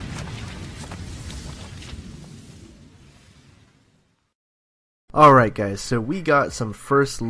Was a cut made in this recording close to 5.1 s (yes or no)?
no